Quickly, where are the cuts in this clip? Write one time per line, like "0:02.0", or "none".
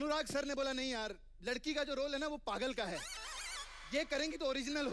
none

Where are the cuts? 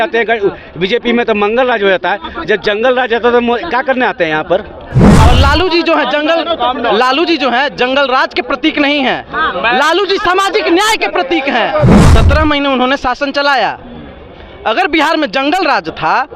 0:05.2
0:12.1

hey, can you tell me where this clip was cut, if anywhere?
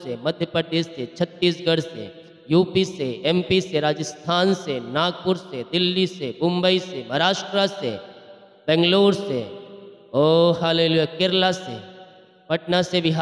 none

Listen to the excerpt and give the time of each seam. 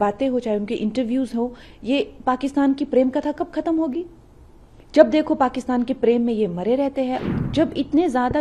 0:07.2

